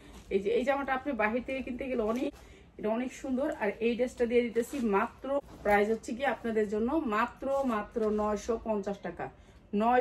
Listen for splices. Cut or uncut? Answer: cut